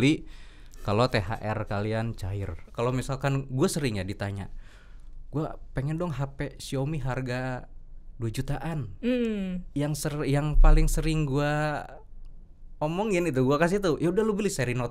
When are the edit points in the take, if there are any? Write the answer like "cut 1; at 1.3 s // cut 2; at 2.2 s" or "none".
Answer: cut 1; at 2.6 s